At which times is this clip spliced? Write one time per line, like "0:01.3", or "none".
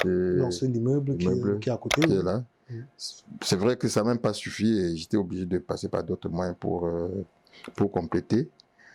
none